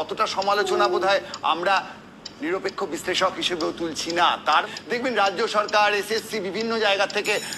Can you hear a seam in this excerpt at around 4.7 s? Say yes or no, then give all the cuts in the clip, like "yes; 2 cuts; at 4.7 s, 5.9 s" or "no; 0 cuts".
yes; 1 cut; at 4.7 s